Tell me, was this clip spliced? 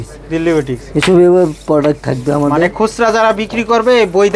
no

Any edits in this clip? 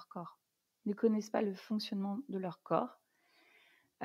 no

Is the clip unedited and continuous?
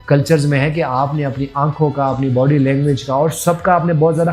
yes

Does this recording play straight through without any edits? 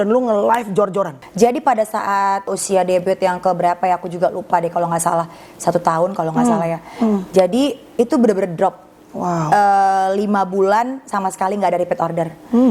no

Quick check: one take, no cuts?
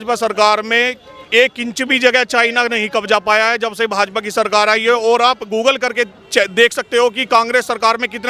yes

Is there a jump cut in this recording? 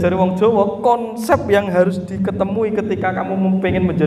no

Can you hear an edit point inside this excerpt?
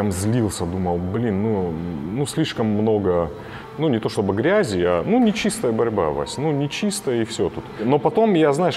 no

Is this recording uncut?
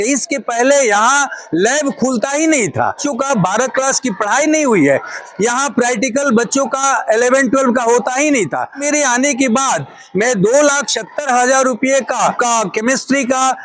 no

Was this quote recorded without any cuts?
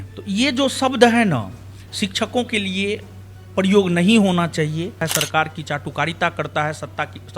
no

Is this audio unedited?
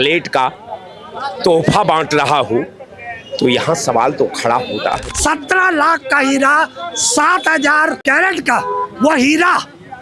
no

